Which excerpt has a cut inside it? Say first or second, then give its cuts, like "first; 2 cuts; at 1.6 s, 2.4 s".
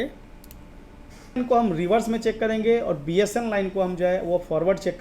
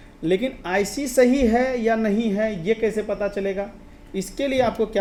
first; 1 cut; at 1.3 s